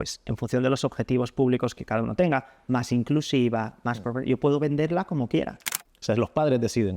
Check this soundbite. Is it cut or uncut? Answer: cut